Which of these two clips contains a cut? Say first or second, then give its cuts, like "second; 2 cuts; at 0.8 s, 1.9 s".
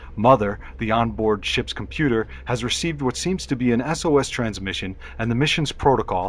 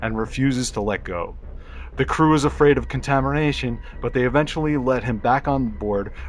second; 1 cut; at 4.9 s